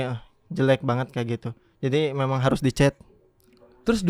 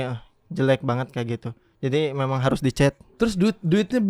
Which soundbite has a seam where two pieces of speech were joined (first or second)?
second